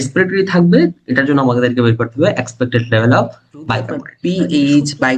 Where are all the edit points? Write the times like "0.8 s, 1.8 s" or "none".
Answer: 4.1 s